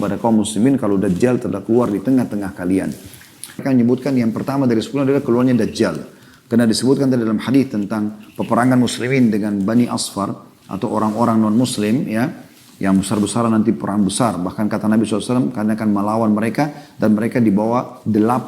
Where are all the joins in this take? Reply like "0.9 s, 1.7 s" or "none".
3.6 s